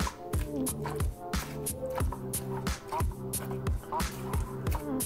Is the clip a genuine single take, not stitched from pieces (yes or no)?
yes